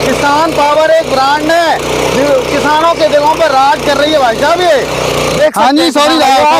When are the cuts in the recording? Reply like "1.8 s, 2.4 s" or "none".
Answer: 5.4 s